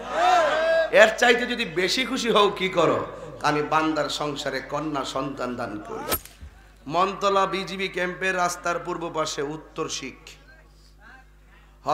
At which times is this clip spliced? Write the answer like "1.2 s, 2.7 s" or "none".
6.2 s